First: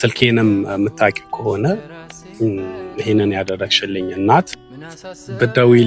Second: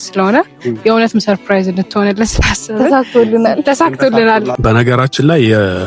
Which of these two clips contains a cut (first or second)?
second